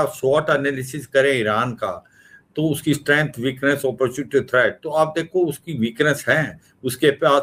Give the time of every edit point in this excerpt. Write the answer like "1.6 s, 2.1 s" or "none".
none